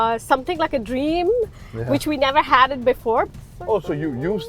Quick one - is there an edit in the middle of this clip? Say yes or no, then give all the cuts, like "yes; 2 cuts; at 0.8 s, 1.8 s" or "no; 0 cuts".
yes; 1 cut; at 3.3 s